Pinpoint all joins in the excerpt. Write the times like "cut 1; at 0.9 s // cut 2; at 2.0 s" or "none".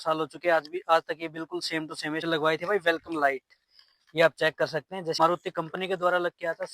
cut 1; at 2.2 s // cut 2; at 5.2 s